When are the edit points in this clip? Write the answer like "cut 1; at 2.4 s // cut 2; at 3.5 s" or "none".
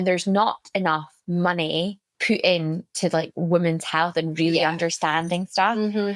cut 1; at 1.1 s // cut 2; at 2.1 s